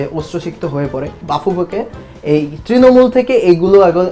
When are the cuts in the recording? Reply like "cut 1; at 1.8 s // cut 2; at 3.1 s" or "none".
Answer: cut 1; at 1.2 s